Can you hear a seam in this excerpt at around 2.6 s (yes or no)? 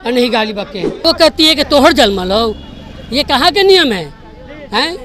no